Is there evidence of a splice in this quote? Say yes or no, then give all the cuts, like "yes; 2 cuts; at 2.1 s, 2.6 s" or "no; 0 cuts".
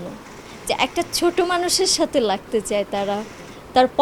no; 0 cuts